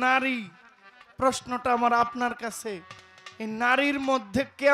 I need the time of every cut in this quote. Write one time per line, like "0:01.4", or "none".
none